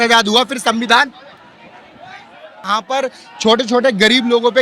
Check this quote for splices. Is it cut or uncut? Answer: cut